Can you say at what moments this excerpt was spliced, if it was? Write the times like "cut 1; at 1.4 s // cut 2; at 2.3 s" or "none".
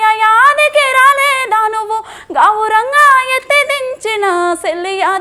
none